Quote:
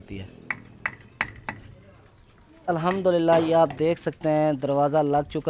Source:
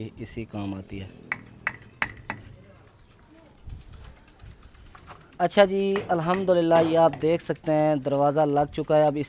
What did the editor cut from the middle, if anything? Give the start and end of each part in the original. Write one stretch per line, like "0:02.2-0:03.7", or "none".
0:03.4-0:06.0

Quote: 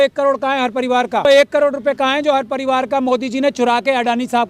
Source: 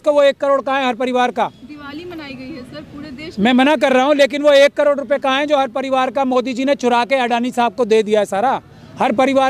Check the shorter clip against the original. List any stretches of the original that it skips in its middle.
0:01.5-0:04.5

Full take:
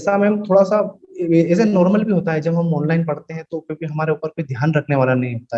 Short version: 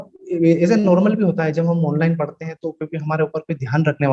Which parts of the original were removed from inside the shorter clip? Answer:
none

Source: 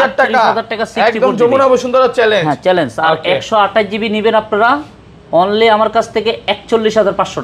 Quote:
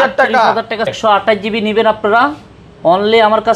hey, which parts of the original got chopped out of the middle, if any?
0:00.9-0:03.4

